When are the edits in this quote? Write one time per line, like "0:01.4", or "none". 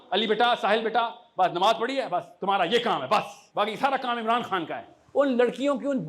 0:03.4
0:05.0

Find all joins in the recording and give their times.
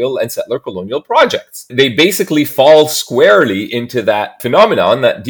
0:01.6
0:04.4

